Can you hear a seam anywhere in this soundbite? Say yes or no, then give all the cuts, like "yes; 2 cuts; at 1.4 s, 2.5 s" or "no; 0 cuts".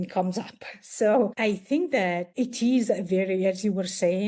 yes; 2 cuts; at 1.3 s, 2.3 s